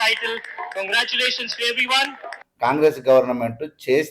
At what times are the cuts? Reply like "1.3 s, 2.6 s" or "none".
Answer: 2.4 s